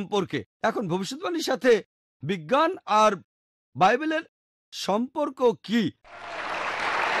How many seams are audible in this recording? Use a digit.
0